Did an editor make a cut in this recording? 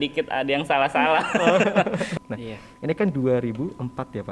yes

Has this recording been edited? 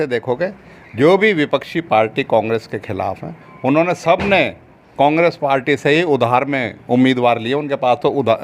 no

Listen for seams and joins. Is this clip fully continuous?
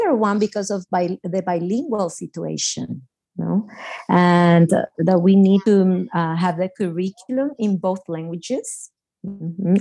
yes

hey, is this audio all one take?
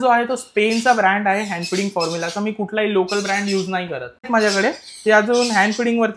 no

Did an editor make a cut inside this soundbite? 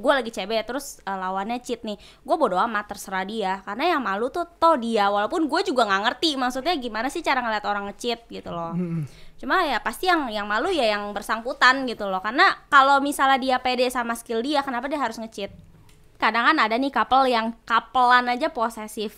yes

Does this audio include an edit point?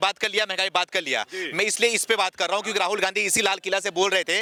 no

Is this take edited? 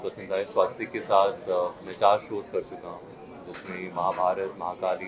no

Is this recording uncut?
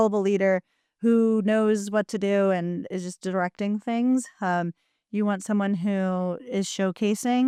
yes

